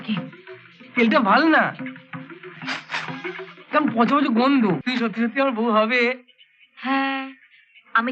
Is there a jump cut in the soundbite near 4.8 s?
yes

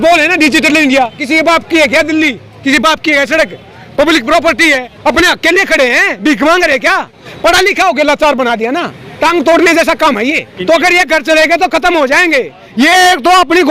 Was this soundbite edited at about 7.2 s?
yes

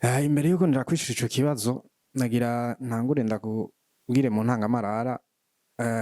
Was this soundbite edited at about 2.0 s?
no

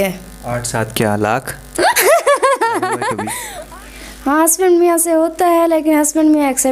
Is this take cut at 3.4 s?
yes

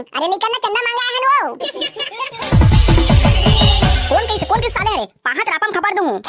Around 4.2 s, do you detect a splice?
no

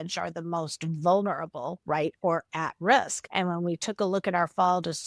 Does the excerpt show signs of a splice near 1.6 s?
no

